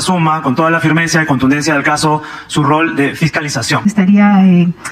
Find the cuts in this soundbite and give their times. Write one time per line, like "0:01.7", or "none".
0:03.8